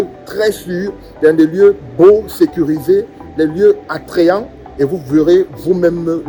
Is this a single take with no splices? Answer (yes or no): yes